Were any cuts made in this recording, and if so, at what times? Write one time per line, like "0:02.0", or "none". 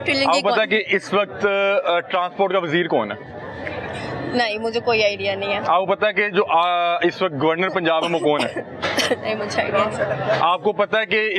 none